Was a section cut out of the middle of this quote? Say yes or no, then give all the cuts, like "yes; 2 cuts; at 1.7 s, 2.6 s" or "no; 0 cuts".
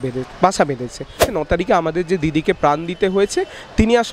yes; 1 cut; at 1.2 s